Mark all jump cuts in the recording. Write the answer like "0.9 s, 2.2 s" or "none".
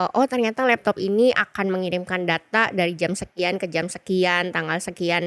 none